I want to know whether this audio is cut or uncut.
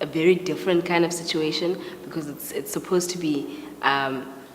cut